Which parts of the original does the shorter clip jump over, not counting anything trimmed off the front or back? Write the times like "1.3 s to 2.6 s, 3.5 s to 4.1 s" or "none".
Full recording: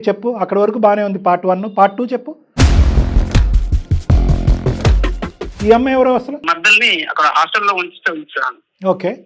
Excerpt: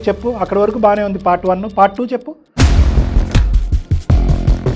none